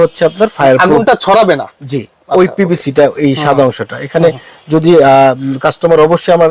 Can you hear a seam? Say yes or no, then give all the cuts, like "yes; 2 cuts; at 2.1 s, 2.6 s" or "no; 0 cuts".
no; 0 cuts